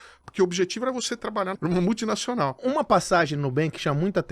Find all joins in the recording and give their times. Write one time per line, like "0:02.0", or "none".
0:01.5
0:02.6